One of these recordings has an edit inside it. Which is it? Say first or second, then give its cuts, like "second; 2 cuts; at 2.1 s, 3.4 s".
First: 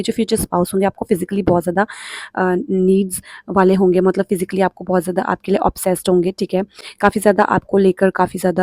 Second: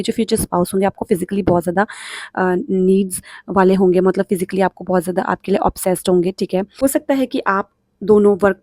second; 1 cut; at 6.7 s